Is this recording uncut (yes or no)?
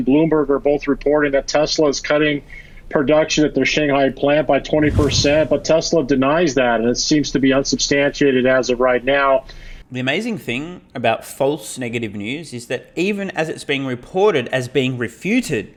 yes